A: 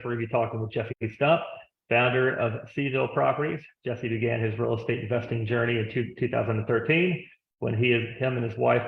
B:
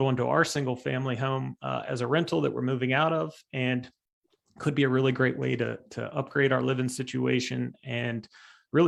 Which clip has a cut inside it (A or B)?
A